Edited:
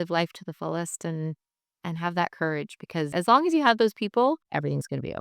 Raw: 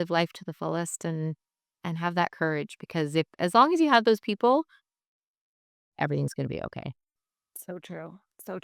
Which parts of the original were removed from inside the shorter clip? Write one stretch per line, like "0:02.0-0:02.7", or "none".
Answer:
0:03.1-0:03.4
0:04.7-0:05.9